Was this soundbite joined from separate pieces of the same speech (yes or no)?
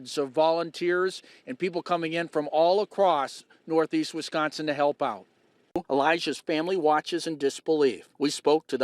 yes